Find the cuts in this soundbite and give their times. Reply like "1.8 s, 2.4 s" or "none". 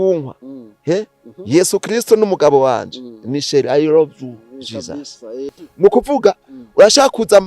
5.5 s